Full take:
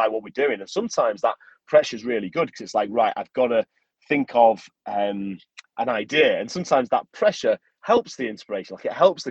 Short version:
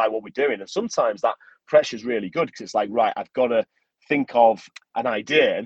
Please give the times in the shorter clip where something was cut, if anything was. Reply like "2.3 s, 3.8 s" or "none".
4.7 s